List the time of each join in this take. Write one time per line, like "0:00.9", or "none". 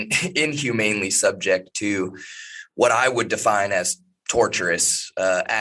none

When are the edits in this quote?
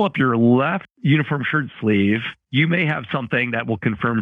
0:00.9
0:02.4

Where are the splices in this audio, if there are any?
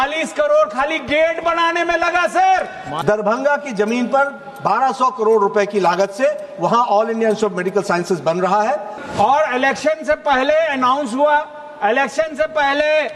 0:02.8
0:09.0

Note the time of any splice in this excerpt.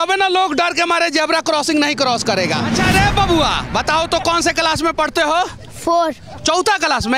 0:02.7

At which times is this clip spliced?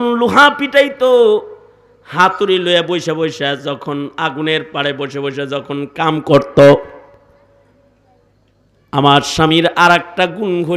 none

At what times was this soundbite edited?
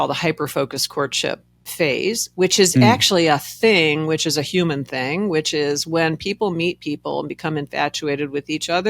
none

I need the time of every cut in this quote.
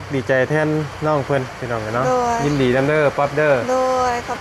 none

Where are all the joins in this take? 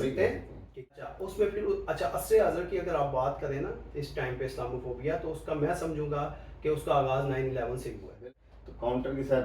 0:00.9
0:08.2

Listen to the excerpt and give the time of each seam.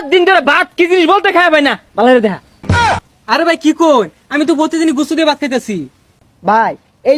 none

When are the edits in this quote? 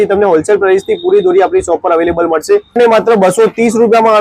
0:02.8

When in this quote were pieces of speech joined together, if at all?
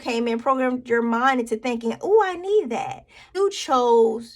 0:03.3

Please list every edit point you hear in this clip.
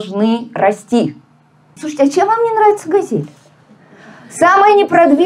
0:01.8

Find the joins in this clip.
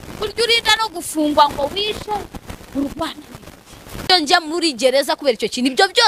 0:04.1

